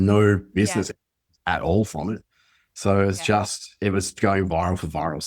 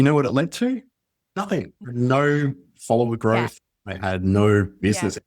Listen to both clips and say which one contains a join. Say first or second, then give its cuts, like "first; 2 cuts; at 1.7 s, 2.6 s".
second; 1 cut; at 1.8 s